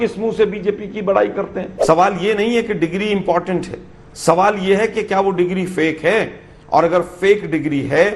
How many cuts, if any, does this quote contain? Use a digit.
1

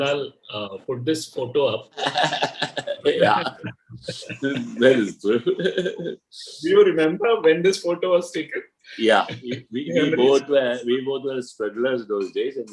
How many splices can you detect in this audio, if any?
0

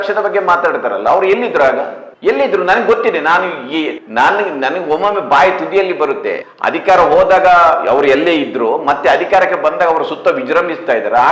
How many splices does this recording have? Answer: 2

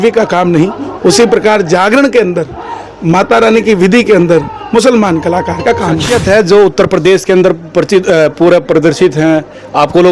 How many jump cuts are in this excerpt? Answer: 1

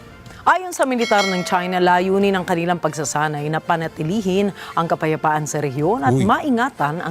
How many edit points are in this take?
1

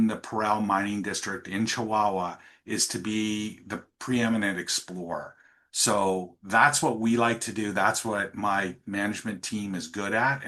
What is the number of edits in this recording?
0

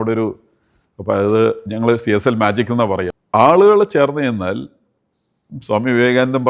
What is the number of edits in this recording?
1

